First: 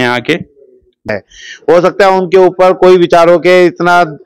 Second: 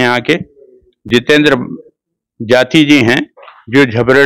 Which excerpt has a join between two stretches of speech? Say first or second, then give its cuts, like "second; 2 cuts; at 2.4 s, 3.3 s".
first; 1 cut; at 1.1 s